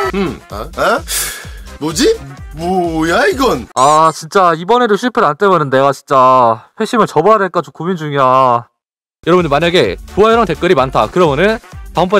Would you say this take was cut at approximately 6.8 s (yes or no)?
no